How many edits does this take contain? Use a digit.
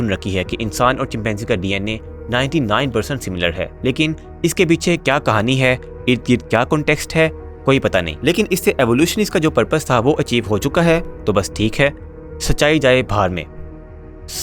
0